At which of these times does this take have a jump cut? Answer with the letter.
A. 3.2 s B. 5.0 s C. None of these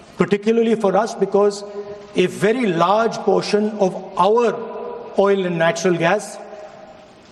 C